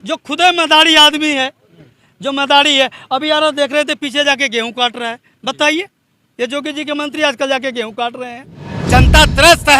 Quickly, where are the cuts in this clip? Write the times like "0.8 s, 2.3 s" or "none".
8.7 s